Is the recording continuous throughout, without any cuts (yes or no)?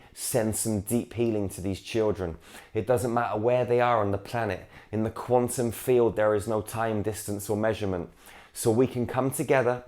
yes